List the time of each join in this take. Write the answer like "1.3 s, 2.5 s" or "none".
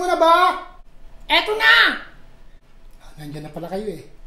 none